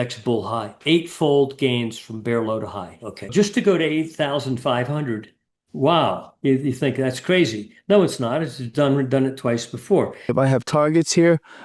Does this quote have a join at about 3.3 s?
yes; 2 cuts; at 3.3 s, 10.3 s

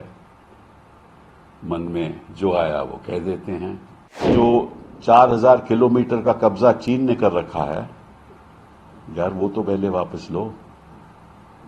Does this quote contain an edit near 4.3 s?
yes; 1 cut; at 4.3 s

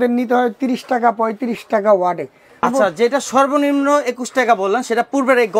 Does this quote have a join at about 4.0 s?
no; 1 cut; at 2.6 s

